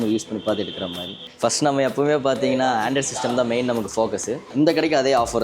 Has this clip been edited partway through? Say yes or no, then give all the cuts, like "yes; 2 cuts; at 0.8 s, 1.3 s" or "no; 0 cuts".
yes; 2 cuts; at 1.2 s, 4.5 s